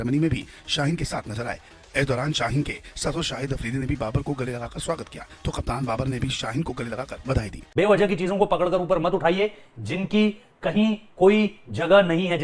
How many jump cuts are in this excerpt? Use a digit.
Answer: 1